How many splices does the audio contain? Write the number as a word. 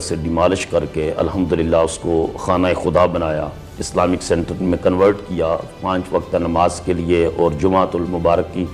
zero